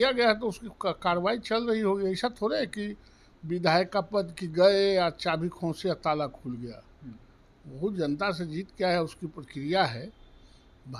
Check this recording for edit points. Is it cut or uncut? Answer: uncut